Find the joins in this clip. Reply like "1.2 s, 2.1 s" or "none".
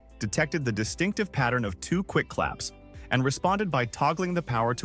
none